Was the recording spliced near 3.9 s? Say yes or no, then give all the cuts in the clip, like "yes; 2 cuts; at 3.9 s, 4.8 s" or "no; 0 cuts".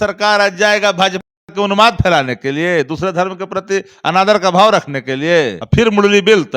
no; 1 cut; at 5.6 s